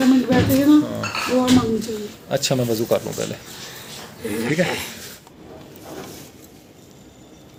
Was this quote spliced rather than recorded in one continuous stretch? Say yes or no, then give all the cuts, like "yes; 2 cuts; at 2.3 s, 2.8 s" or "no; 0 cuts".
no; 0 cuts